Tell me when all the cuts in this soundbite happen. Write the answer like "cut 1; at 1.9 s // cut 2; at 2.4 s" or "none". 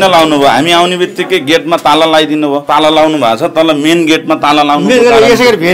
cut 1; at 2.6 s